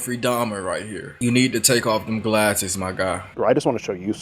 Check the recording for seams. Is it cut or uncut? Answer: cut